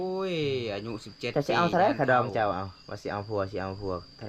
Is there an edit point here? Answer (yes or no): no